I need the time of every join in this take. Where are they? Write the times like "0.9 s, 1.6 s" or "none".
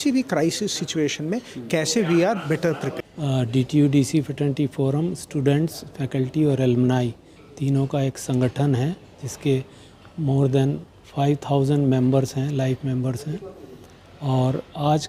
none